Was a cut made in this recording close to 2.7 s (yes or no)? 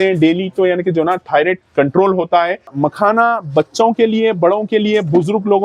yes